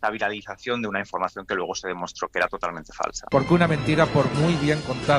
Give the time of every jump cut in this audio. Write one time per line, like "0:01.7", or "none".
0:03.2